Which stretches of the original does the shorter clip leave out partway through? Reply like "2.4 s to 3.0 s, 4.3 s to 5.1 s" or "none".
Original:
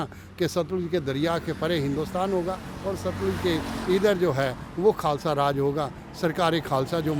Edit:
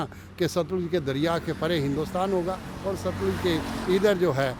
none

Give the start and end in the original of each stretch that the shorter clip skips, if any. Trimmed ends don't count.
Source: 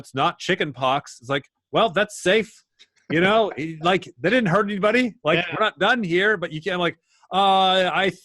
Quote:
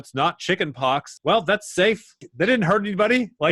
1.1 s to 1.6 s, 2.7 s to 4.1 s

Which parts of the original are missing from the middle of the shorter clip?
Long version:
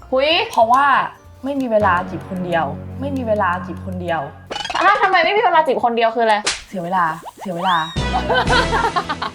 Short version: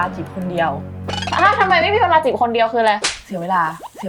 2.9 s to 4.4 s

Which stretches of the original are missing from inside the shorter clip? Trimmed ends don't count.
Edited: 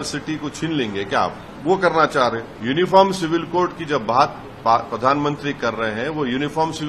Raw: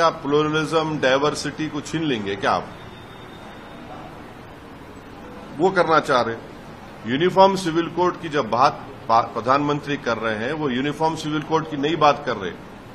2.8 s to 5.4 s, 6.4 s to 6.9 s

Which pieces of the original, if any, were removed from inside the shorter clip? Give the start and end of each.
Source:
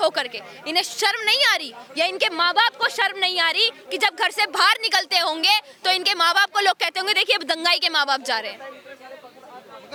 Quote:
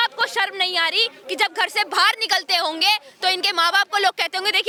none

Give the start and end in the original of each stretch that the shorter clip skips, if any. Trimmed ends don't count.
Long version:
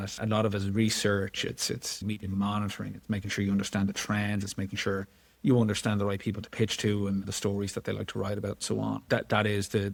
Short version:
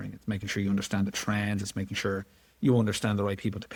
none

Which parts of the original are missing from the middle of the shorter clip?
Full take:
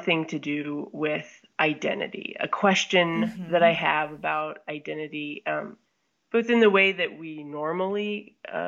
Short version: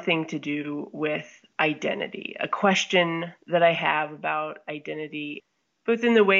5.4 s to 5.8 s

